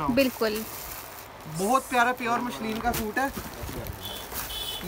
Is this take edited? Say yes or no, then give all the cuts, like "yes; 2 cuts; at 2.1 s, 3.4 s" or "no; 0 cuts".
no; 0 cuts